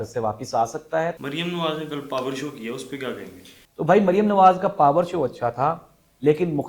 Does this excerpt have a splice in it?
no; 0 cuts

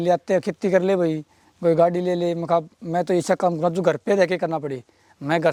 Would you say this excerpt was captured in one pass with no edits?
yes; 0 cuts

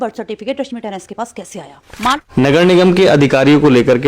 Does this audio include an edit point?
yes; 1 cut; at 2.1 s

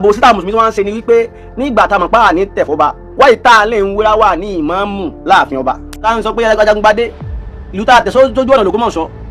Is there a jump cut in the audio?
yes; 1 cut; at 6.0 s

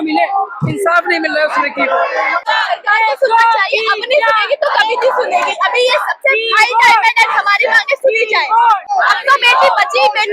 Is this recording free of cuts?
no; 2 cuts; at 2.4 s, 8.8 s

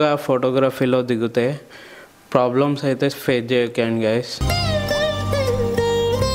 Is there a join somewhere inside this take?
no; 0 cuts

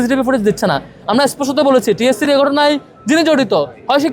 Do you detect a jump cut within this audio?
no; 0 cuts

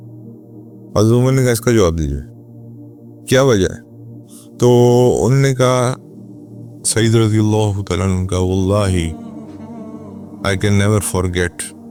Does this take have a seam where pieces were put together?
no; 0 cuts

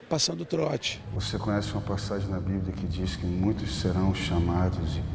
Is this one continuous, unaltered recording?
no; 1 cut; at 1.2 s

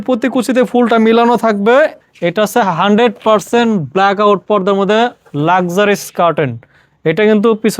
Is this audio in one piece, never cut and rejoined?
no; 1 cut; at 2.1 s

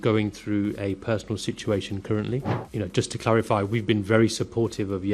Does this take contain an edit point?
no; 0 cuts

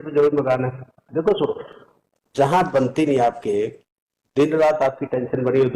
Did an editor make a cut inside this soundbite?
yes; 1 cut; at 1.0 s

